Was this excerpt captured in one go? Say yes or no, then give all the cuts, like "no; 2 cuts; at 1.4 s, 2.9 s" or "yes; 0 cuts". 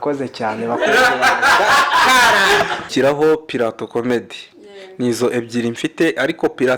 no; 1 cut; at 2.9 s